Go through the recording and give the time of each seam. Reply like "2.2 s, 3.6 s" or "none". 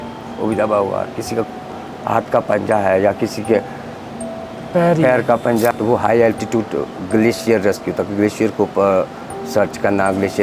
5.7 s